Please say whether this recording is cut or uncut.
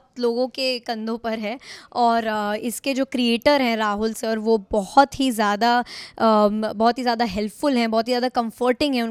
uncut